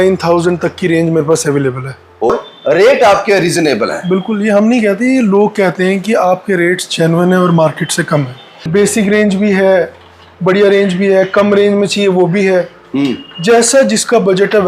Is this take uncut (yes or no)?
no